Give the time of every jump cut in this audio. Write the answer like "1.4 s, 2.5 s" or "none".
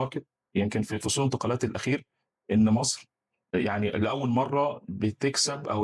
none